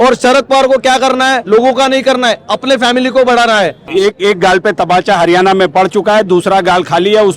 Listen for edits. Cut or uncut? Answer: cut